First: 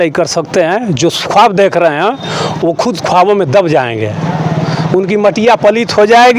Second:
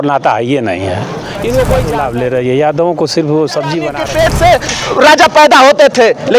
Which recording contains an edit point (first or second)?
second